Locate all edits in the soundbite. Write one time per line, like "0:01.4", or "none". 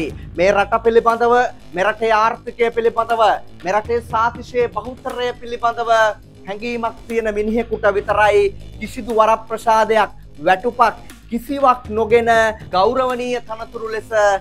none